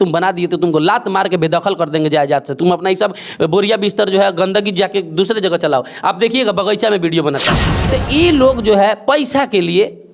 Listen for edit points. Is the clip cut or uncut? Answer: cut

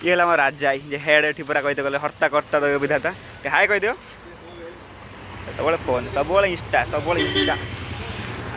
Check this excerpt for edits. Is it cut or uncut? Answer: uncut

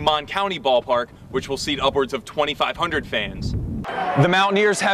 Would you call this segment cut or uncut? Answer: cut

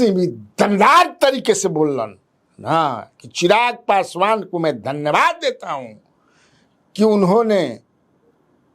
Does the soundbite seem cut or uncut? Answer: uncut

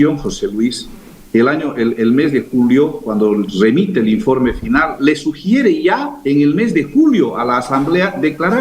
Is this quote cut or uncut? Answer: cut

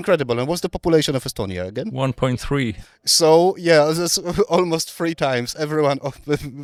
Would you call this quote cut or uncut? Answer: uncut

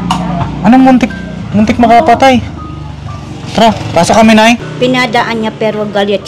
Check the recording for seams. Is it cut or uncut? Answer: cut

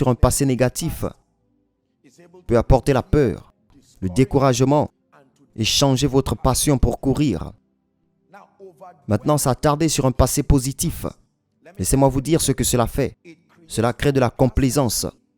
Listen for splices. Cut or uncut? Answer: uncut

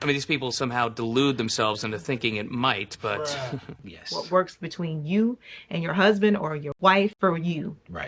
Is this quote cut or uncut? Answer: cut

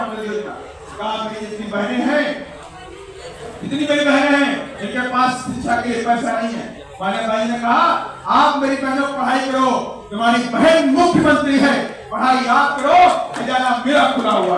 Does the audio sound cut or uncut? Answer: uncut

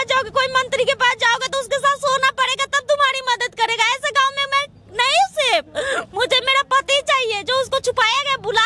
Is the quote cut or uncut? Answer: uncut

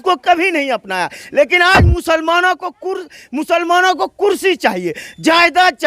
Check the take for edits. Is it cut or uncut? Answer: uncut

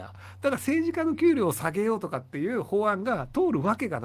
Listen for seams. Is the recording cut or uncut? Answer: uncut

